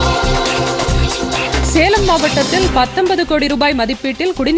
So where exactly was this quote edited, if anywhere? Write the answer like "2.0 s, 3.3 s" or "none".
1.5 s